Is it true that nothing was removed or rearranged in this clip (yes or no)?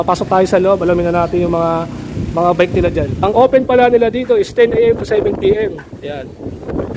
no